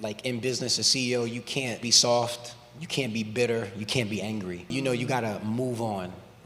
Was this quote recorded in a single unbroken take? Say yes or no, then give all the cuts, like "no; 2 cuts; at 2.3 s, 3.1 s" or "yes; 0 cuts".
no; 2 cuts; at 1.8 s, 4.6 s